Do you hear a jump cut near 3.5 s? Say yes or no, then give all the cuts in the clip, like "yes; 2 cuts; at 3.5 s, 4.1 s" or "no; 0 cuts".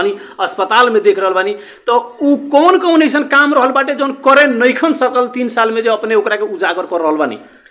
no; 0 cuts